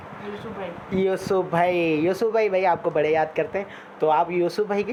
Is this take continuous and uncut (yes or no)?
yes